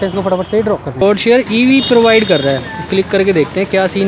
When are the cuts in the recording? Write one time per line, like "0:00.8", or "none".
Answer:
0:01.0